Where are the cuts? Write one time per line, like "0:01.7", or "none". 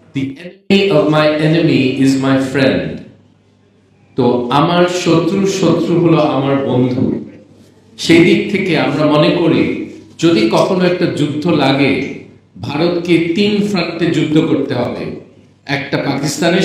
none